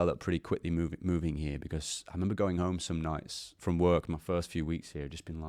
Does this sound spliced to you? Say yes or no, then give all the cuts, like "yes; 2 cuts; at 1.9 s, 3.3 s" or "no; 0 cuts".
no; 0 cuts